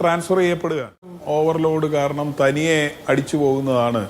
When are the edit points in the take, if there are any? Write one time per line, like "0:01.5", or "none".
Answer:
0:01.2